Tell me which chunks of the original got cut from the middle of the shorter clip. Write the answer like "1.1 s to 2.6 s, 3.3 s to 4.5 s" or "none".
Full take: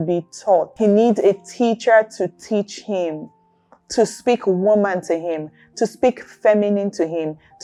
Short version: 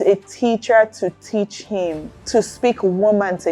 3.3 s to 3.8 s